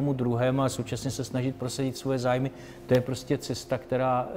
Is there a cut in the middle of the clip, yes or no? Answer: no